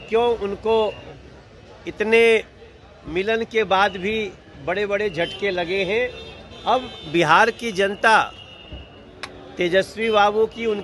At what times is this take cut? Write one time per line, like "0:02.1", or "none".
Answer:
none